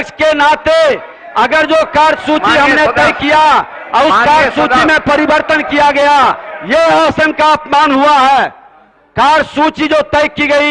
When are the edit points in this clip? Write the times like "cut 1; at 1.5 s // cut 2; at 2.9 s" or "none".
none